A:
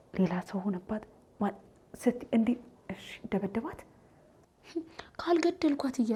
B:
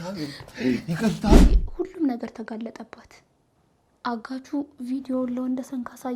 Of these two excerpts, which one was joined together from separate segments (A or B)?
B